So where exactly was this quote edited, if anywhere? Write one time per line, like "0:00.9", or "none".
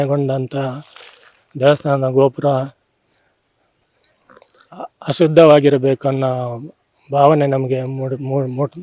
none